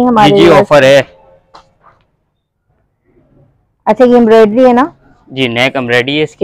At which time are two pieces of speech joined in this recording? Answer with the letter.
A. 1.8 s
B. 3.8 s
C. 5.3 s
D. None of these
D